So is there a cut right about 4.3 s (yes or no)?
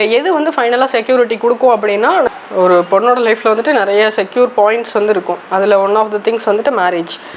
no